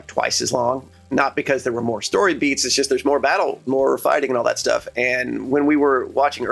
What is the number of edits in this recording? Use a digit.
2